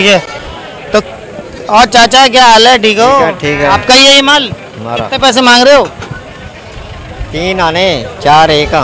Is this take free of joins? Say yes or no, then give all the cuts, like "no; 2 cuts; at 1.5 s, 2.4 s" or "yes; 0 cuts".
yes; 0 cuts